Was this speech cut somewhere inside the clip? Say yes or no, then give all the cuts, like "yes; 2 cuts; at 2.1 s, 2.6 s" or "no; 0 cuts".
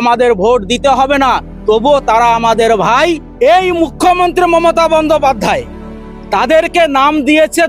yes; 1 cut; at 3.3 s